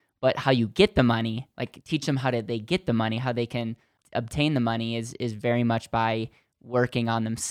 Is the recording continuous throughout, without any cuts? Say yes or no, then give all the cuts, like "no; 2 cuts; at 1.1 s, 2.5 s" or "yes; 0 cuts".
no; 1 cut; at 3.9 s